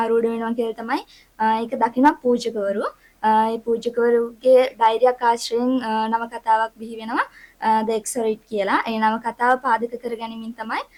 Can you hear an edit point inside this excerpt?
no; 0 cuts

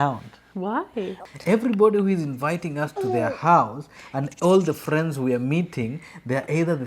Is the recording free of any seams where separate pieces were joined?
no; 1 cut; at 1.2 s

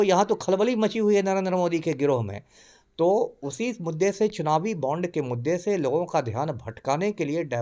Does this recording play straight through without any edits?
yes; 0 cuts

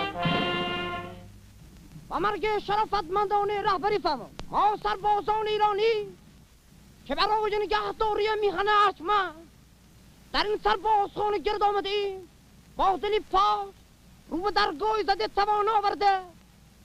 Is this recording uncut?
yes; 0 cuts

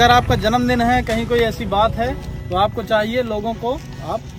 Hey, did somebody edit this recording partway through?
no; 0 cuts

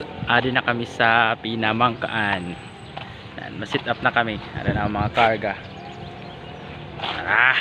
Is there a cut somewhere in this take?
no; 0 cuts

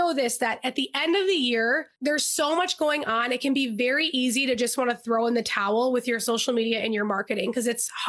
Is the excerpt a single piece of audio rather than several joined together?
no; 1 cut; at 1.9 s

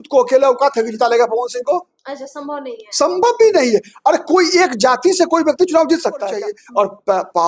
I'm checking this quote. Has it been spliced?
yes; 1 cut; at 6.3 s

